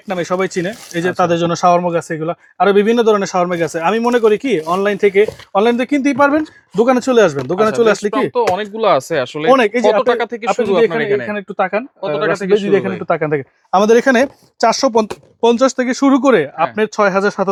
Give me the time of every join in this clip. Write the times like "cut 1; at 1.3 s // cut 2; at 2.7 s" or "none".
none